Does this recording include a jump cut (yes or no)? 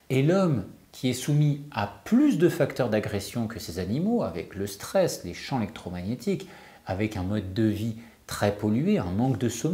no